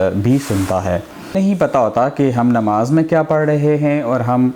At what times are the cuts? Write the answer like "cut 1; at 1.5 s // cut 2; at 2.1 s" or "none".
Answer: cut 1; at 1.3 s

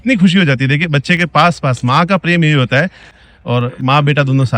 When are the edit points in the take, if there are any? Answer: cut 1; at 3.1 s

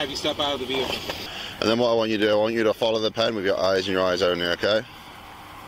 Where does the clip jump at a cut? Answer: cut 1; at 1.2 s

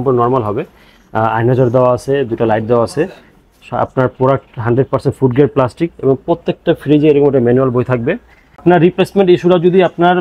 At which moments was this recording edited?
cut 1; at 8.6 s

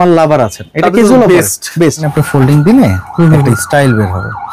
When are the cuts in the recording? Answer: cut 1; at 2.1 s

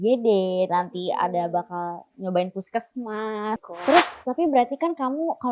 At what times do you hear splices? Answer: cut 1; at 3.6 s

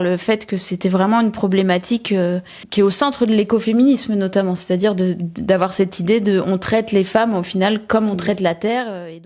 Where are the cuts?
none

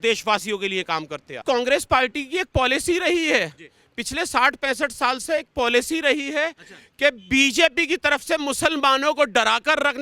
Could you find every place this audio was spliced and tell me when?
cut 1; at 1.4 s

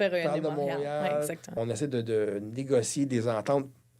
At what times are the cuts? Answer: cut 1; at 1.5 s

